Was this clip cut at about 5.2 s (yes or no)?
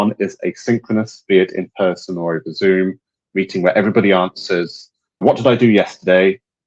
yes